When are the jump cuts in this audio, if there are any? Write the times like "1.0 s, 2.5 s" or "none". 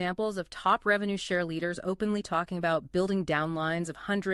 none